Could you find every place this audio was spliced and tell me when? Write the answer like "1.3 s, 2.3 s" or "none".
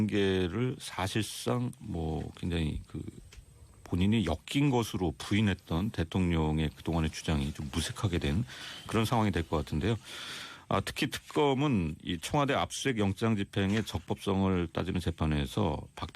15.1 s